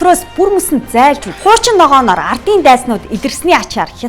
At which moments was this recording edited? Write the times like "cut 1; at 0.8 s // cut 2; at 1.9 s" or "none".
cut 1; at 1.3 s